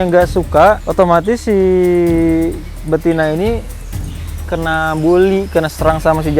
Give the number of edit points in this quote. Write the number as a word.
zero